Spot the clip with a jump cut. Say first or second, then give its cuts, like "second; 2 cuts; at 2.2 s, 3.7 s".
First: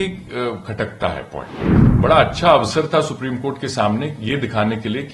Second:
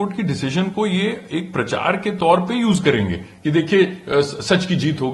first; 1 cut; at 1.8 s